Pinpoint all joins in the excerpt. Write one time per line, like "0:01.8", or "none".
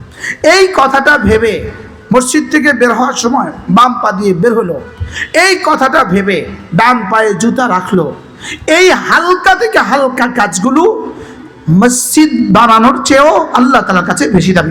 none